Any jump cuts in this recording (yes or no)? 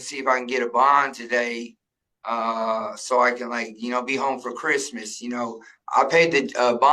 yes